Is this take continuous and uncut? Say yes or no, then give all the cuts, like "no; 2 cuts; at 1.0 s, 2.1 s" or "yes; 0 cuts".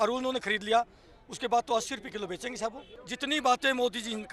no; 1 cut; at 3.0 s